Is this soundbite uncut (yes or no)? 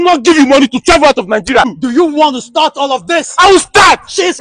no